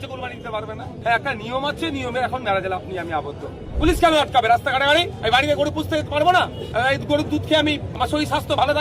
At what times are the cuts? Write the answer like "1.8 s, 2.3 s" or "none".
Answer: 0.9 s, 3.7 s, 5.1 s, 6.6 s, 7.9 s